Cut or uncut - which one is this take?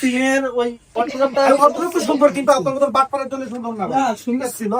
uncut